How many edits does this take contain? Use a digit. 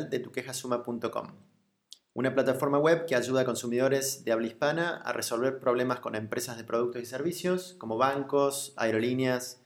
3